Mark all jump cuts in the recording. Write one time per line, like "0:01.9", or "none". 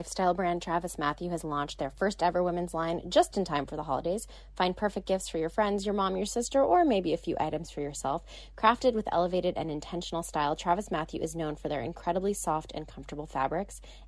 none